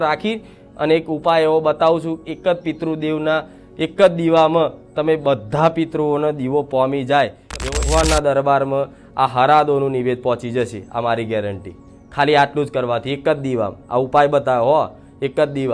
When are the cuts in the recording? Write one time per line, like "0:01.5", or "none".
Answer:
0:07.6